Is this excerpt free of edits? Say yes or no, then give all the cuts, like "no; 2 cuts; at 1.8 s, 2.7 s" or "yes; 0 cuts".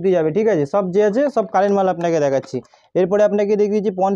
yes; 0 cuts